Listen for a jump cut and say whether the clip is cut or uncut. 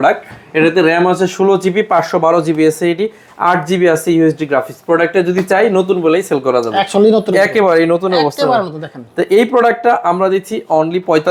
uncut